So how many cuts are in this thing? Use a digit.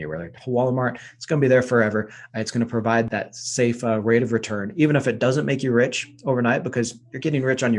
1